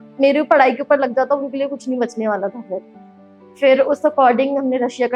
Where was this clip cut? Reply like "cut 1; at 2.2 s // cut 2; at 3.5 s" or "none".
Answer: none